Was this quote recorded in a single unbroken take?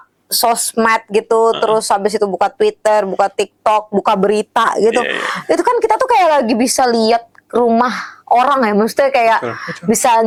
yes; 0 cuts

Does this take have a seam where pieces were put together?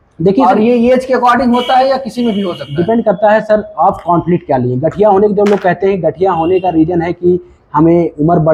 no; 0 cuts

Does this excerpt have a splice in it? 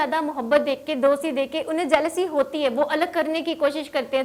no; 0 cuts

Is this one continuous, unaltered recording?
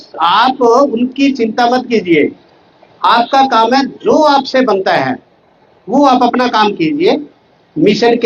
yes; 0 cuts

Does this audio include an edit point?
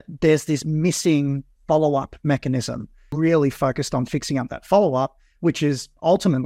yes; 1 cut; at 3.0 s

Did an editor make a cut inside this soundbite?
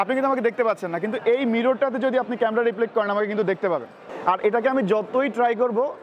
yes; 1 cut; at 4.0 s

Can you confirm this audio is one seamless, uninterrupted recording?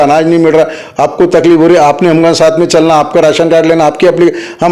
yes; 0 cuts

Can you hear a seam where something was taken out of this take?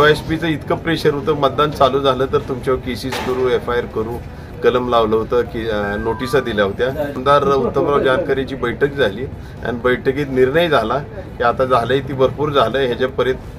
yes; 1 cut; at 7.2 s

